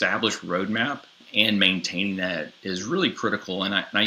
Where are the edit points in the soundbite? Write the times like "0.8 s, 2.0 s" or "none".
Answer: 1.3 s